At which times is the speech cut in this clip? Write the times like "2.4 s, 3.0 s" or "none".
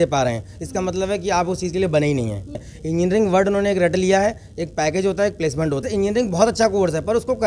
2.6 s, 5.8 s